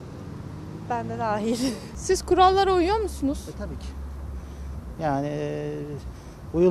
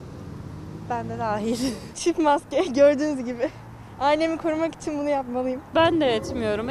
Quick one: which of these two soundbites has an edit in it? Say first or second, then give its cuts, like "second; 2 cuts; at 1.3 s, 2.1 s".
second; 2 cuts; at 1.9 s, 5.6 s